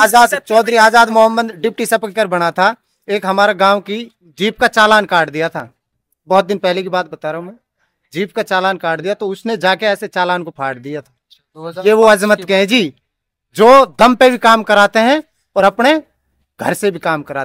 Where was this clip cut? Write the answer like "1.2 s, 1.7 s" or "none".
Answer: none